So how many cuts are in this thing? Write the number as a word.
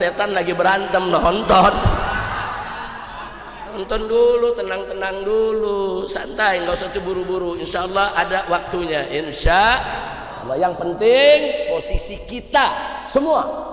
zero